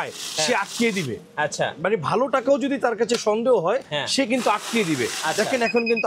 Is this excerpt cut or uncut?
uncut